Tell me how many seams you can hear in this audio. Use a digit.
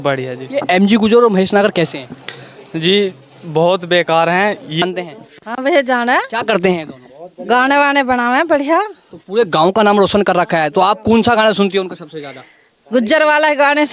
1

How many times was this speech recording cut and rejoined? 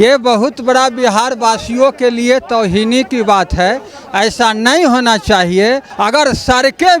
1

